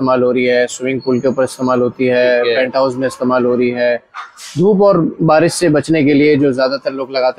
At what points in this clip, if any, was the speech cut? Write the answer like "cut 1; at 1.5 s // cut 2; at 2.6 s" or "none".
none